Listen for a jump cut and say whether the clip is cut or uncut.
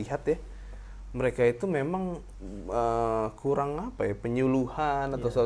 uncut